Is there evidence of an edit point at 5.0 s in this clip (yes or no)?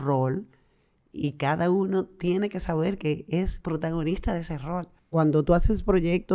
yes